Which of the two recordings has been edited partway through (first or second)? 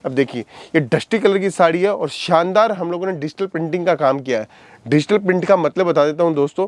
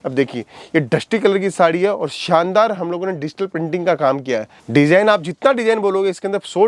second